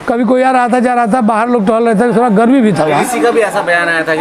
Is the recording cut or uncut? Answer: uncut